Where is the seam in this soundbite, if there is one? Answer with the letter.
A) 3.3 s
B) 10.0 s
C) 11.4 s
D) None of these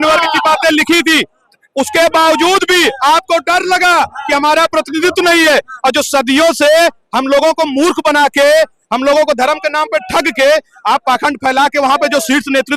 D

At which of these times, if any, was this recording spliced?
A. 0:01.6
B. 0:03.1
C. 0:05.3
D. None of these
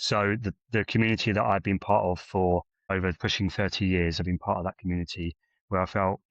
B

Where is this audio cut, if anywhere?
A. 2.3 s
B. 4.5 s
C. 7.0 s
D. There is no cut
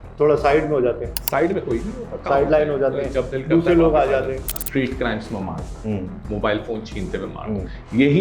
B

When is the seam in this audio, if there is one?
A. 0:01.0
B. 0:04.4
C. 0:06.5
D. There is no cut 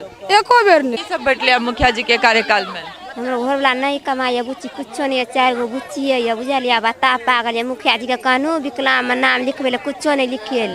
A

